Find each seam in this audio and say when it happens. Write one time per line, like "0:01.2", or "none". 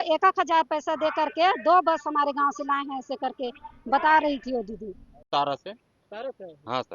0:05.1